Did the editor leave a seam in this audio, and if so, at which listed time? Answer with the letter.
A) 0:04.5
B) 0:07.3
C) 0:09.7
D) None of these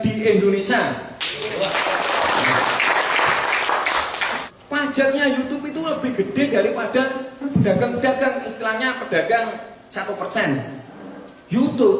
A